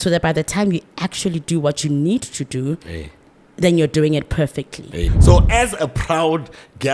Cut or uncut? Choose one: cut